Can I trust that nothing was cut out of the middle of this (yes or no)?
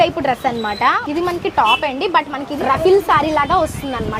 no